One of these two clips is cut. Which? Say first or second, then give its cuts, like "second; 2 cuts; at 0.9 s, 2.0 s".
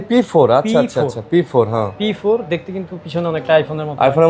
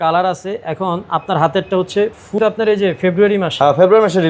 second; 1 cut; at 2.4 s